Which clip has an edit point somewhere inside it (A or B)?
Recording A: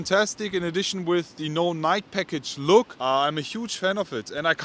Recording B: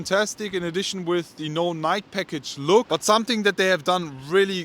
B